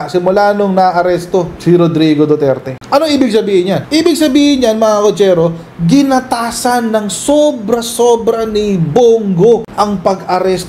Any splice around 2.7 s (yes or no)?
yes